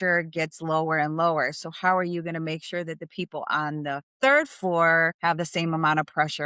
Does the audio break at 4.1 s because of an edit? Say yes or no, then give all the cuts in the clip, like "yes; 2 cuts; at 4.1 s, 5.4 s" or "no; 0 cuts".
yes; 2 cuts; at 4.1 s, 5.1 s